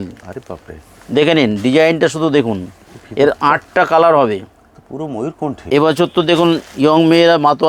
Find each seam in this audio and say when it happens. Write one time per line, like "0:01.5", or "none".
0:05.5